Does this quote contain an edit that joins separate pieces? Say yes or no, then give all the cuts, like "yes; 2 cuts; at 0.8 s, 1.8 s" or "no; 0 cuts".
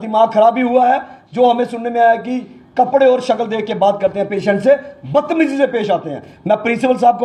no; 0 cuts